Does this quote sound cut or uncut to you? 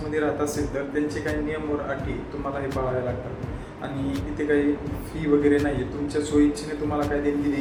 uncut